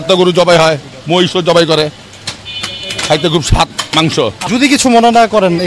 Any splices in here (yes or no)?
yes